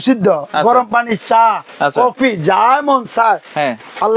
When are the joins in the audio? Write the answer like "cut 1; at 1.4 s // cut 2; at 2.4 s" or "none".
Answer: none

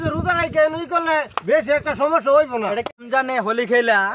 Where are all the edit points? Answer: cut 1; at 3.0 s

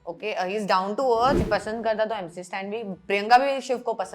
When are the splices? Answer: cut 1; at 1.4 s

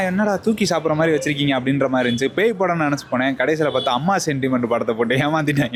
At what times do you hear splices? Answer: none

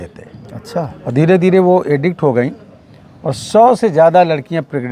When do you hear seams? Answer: none

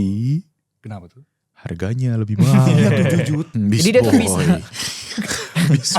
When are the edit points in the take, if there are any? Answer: cut 1; at 3.5 s

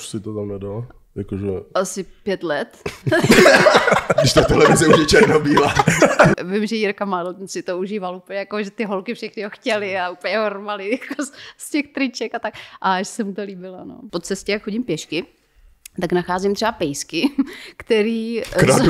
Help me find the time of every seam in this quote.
cut 1; at 6.4 s // cut 2; at 14.0 s

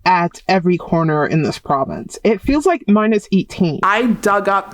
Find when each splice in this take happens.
cut 1; at 3.8 s

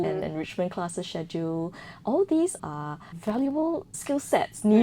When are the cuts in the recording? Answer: cut 1; at 2.7 s // cut 2; at 3.9 s

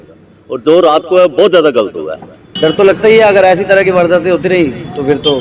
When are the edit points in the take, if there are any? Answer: cut 1; at 2.5 s

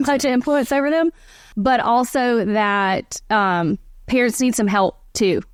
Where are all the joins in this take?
none

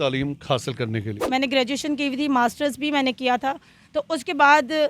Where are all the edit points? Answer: cut 1; at 1.2 s

